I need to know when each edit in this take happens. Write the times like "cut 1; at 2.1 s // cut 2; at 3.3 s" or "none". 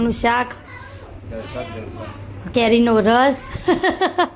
none